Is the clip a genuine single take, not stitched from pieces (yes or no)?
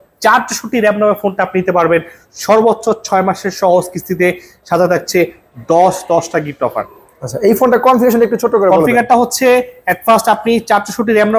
yes